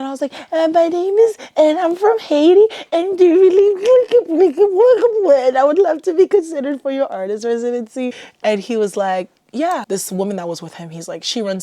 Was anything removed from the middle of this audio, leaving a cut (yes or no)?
yes